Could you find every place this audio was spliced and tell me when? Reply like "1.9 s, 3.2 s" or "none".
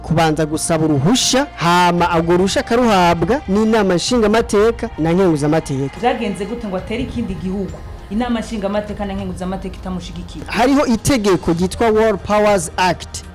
1.5 s, 3.4 s, 4.9 s, 5.9 s, 10.5 s